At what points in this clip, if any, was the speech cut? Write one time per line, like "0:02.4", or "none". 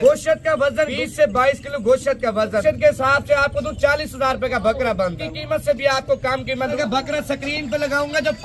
0:00.9
0:02.6
0:05.2
0:06.7